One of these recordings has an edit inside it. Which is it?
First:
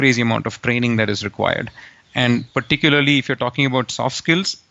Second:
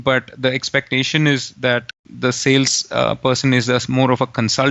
second; 1 cut; at 2.0 s

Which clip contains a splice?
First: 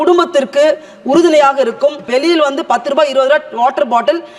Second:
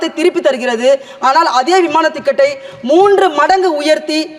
first; 1 cut; at 2.1 s

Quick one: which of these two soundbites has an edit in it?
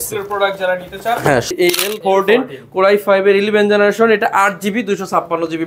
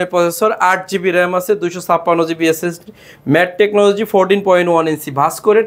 first; 1 cut; at 1.5 s

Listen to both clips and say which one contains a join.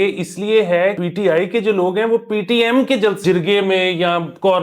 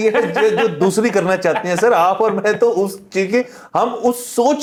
first; 2 cuts; at 1.0 s, 3.2 s

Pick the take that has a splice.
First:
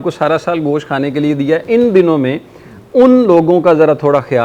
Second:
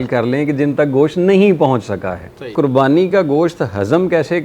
second; 1 cut; at 2.5 s

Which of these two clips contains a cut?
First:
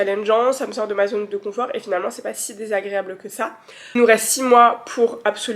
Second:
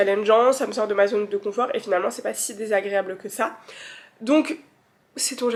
first; 1 cut; at 3.9 s

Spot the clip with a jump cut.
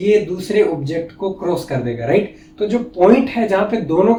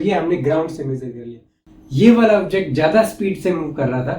second; 1 cut; at 1.5 s

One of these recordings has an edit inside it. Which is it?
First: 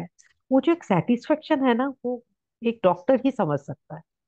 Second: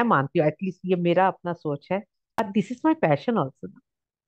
second; 1 cut; at 2.4 s

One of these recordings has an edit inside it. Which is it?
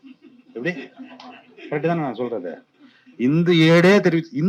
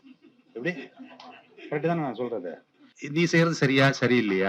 second; 1 cut; at 2.9 s

